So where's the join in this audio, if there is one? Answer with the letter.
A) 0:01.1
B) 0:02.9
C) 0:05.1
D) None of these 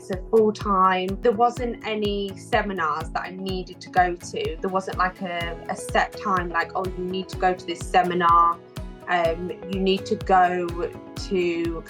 A